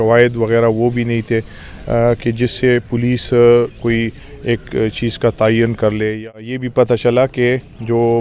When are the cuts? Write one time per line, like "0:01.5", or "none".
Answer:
0:06.6